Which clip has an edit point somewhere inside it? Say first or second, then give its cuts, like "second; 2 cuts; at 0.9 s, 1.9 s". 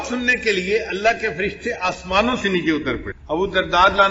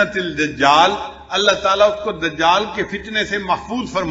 first; 1 cut; at 3.1 s